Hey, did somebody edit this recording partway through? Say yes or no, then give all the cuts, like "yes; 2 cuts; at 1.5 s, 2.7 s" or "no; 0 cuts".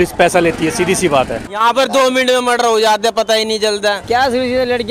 yes; 2 cuts; at 1.4 s, 4.0 s